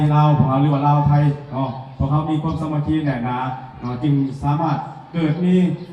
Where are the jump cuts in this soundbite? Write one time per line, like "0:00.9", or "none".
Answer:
none